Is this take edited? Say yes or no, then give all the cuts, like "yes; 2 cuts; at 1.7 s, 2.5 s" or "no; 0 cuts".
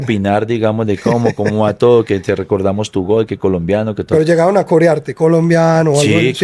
yes; 1 cut; at 4.0 s